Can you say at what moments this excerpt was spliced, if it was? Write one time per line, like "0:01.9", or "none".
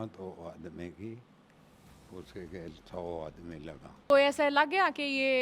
0:04.1